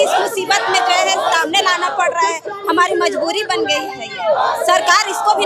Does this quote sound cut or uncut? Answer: uncut